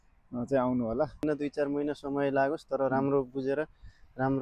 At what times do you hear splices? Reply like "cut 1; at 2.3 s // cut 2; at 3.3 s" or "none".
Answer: cut 1; at 1.2 s